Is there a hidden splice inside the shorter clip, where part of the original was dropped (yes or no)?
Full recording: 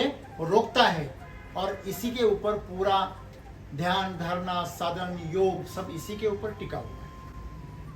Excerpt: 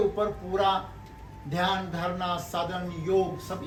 no